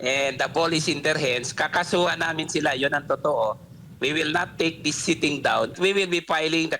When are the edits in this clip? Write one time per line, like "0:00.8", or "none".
0:05.8